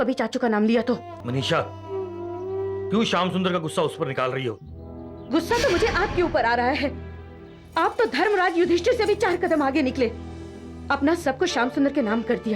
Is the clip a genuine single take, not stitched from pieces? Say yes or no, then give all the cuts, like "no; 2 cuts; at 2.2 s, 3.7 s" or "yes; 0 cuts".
no; 1 cut; at 1.1 s